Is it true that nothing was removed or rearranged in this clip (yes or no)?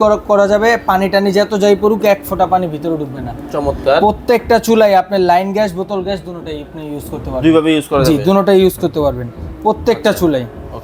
yes